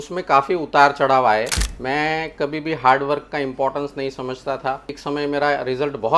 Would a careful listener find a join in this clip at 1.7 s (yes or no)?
yes